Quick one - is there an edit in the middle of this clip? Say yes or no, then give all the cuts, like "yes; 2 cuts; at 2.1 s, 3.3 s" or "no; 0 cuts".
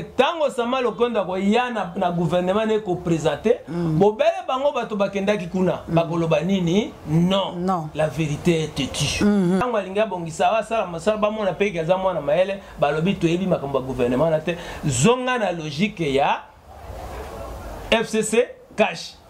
yes; 1 cut; at 9.6 s